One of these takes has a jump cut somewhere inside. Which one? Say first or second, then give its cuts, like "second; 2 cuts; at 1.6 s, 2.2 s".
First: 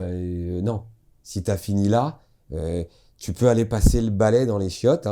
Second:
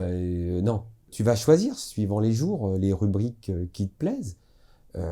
second; 1 cut; at 1.1 s